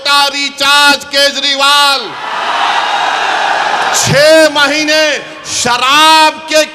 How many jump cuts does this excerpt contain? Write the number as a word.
zero